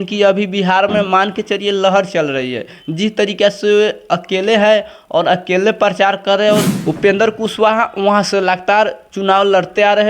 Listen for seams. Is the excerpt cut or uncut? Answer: cut